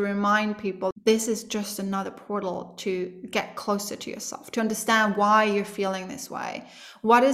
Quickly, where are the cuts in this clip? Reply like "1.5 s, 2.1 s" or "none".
0.9 s